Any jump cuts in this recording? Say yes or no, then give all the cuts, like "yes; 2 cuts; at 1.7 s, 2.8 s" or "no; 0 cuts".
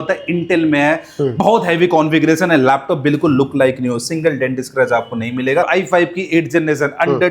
yes; 1 cut; at 5.7 s